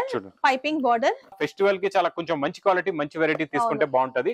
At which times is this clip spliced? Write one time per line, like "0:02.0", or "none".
0:01.4